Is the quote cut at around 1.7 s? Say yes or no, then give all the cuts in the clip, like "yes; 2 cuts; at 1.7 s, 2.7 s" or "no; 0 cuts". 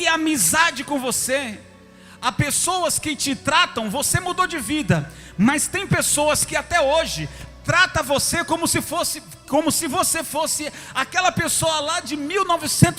no; 0 cuts